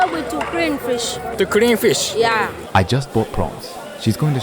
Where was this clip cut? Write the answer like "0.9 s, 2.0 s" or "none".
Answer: 1.3 s, 2.6 s